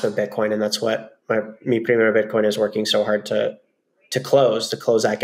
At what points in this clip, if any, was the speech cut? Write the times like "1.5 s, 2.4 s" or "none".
none

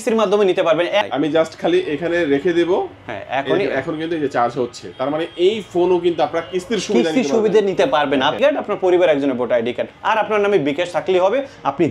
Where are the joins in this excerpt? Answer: 1.0 s, 8.4 s

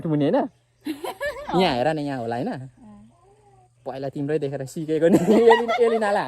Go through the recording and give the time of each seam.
none

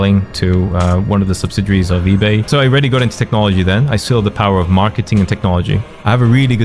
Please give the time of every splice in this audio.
2.5 s, 5.9 s

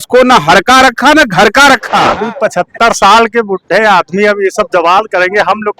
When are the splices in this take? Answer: 2.2 s

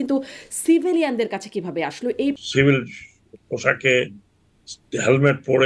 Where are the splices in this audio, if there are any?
2.4 s

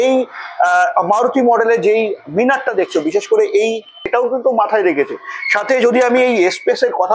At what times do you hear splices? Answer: 4.1 s

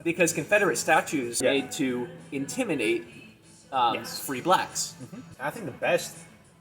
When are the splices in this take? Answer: 1.4 s, 5.3 s

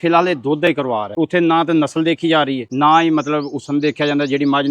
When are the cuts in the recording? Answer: 1.1 s, 2.6 s

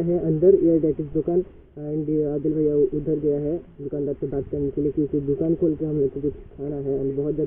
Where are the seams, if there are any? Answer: none

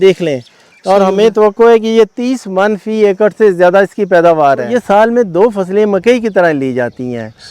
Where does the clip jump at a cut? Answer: 4.8 s

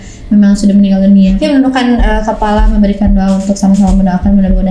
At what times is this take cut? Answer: 1.4 s

